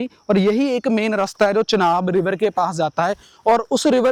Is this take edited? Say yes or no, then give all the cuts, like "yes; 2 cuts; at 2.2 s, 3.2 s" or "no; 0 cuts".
no; 0 cuts